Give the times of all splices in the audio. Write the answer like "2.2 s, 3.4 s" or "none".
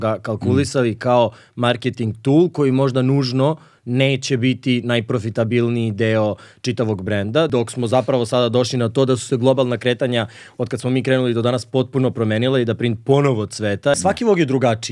7.5 s, 13.9 s